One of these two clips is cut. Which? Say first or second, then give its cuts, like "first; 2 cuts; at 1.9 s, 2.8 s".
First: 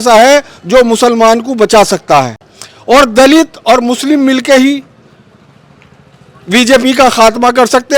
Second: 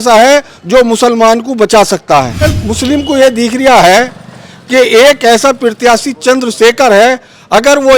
second; 1 cut; at 2.6 s